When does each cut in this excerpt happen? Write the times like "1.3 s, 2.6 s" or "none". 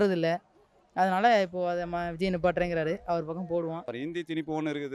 4.0 s